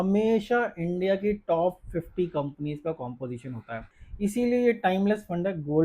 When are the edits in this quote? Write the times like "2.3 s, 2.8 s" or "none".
4.0 s